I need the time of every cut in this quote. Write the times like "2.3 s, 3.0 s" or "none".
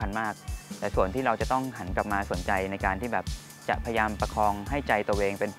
none